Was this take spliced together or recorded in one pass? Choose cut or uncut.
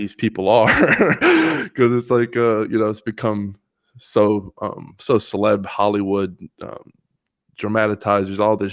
uncut